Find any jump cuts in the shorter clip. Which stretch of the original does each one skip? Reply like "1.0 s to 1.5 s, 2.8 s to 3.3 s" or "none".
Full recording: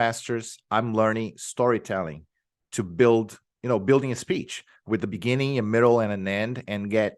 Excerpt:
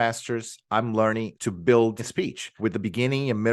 1.3 s to 2.7 s, 3.5 s to 4.5 s